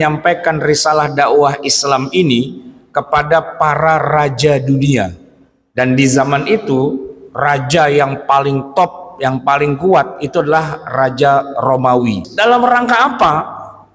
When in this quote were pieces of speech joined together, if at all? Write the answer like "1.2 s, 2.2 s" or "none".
12.3 s